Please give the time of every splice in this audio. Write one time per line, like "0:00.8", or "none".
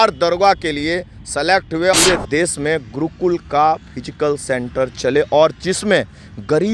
0:01.9

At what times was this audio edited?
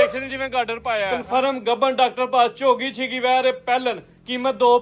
0:01.2

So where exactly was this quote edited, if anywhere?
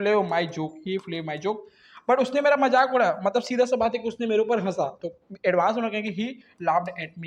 none

